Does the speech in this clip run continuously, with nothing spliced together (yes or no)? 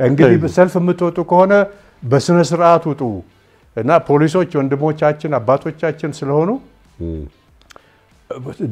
yes